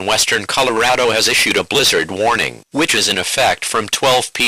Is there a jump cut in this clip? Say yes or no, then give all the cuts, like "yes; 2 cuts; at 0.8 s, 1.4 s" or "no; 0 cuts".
yes; 2 cuts; at 1.6 s, 2.8 s